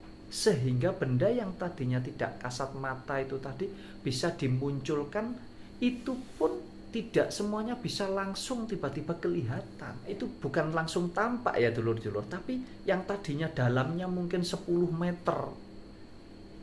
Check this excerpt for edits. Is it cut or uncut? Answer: cut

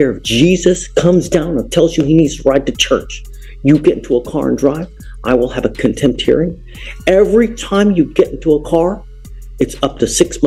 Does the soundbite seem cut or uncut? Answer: uncut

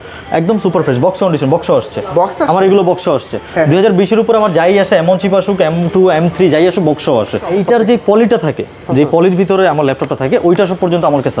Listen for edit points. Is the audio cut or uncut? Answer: cut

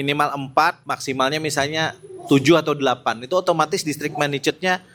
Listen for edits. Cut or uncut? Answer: uncut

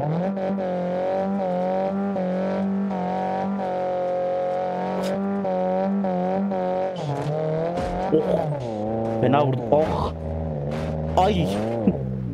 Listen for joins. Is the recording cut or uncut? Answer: uncut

